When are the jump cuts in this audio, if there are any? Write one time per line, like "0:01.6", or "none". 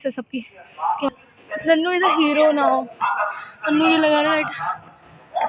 0:01.1